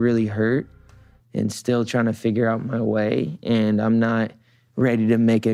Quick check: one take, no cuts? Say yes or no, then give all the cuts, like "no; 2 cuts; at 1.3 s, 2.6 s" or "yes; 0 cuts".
yes; 0 cuts